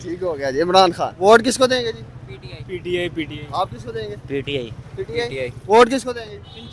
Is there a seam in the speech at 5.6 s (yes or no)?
yes